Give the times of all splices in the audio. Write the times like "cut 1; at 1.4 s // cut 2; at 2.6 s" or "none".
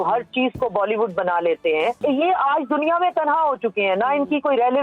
cut 1; at 2.0 s